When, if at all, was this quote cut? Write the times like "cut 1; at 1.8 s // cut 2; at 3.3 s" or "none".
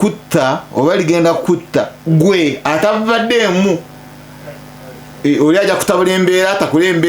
none